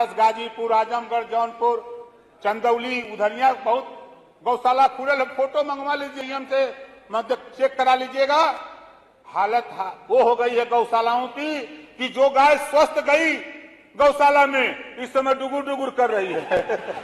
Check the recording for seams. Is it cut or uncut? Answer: cut